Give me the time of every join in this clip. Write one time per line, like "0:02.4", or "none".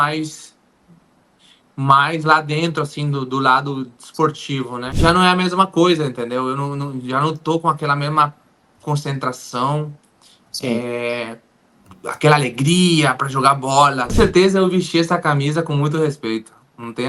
0:04.8
0:14.1